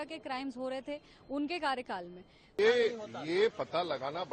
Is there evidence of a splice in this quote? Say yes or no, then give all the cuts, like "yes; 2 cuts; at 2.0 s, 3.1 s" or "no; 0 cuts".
yes; 1 cut; at 2.6 s